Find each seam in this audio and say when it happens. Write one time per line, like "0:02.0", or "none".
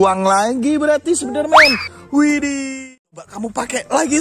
0:02.9